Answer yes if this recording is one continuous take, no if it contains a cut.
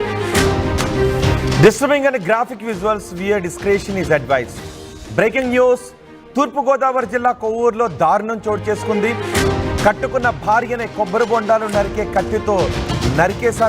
no